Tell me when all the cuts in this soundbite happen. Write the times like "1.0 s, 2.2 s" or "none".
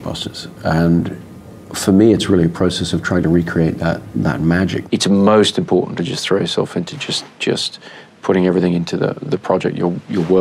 4.8 s

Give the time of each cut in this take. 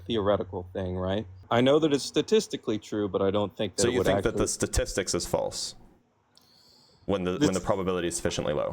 1.4 s

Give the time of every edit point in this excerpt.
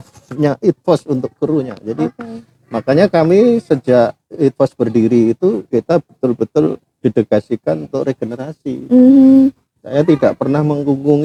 none

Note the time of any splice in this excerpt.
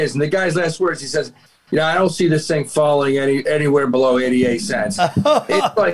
none

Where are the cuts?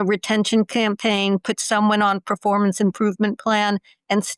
none

